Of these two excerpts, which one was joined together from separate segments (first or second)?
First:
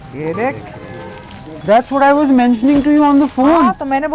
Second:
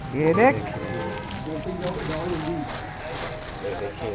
first